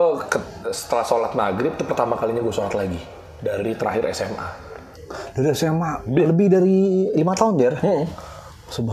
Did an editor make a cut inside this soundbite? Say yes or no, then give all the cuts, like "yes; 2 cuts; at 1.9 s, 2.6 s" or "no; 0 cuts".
no; 0 cuts